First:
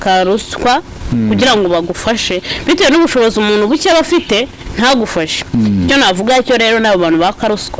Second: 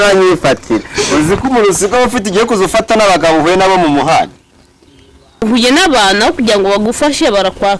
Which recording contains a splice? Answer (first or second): second